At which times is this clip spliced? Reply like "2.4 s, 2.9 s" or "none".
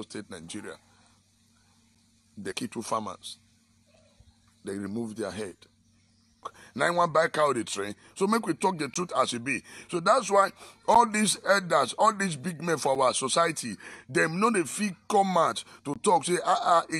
6.6 s